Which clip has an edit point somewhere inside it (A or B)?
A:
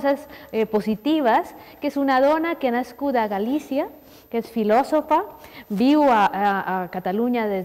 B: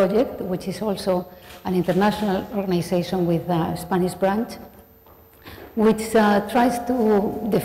B